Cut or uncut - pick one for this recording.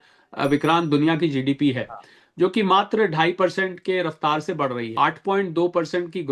cut